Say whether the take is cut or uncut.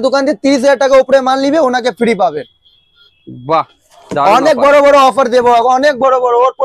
uncut